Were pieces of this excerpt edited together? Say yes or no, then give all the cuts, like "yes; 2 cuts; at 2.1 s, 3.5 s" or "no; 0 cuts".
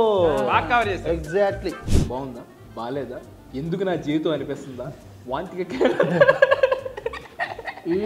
yes; 1 cut; at 1.9 s